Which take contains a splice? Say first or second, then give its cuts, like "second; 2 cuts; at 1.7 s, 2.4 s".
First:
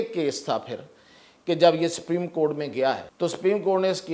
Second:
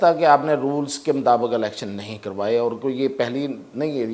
first; 1 cut; at 3.1 s